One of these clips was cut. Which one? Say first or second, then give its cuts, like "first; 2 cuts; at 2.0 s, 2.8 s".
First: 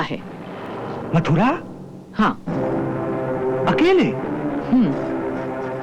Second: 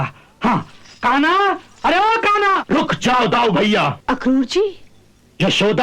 second; 2 cuts; at 2.6 s, 4.0 s